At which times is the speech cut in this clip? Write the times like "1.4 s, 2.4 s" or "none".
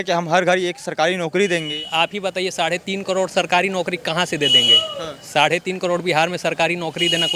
none